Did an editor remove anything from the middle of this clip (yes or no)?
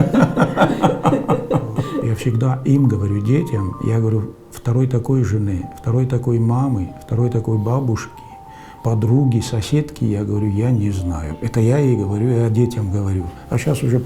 yes